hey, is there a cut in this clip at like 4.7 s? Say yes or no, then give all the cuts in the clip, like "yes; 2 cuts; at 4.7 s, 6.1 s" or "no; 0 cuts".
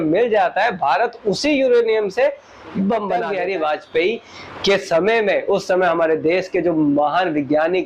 no; 1 cut; at 3.3 s